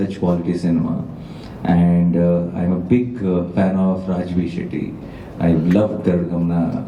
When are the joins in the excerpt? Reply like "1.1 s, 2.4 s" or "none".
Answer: none